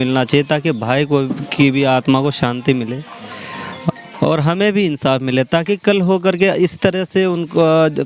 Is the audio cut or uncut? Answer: uncut